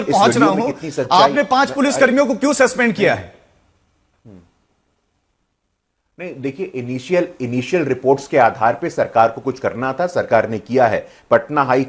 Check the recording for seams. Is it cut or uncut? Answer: uncut